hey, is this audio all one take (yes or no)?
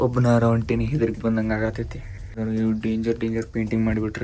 no